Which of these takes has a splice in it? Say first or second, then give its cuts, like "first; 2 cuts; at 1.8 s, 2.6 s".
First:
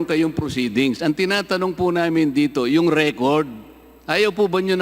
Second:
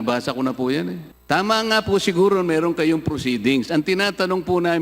second; 1 cut; at 1.1 s